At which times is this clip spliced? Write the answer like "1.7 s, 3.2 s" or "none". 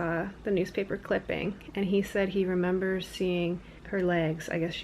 3.7 s